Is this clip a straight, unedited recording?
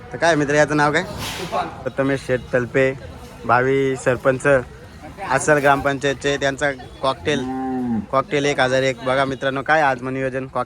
no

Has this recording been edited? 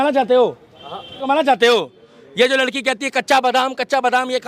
yes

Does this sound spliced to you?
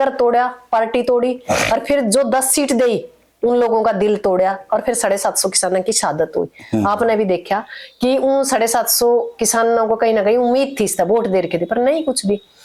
no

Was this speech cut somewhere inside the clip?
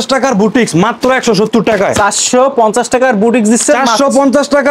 no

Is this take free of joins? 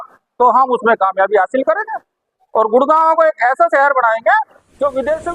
yes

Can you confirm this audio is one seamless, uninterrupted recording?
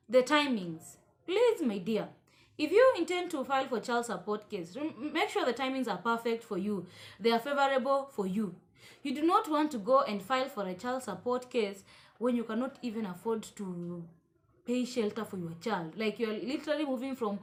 yes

